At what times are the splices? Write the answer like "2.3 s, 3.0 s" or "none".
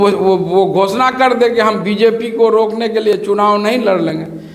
none